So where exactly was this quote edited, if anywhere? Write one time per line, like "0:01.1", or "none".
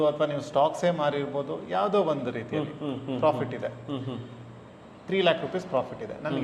none